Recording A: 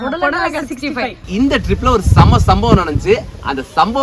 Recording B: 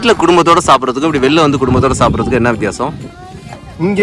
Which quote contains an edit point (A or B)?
A